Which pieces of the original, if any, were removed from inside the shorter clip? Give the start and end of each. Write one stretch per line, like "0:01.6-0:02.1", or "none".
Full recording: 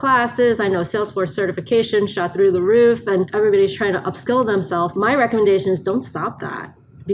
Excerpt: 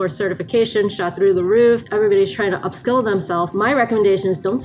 0:03.0-0:03.3